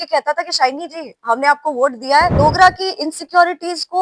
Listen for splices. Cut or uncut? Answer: cut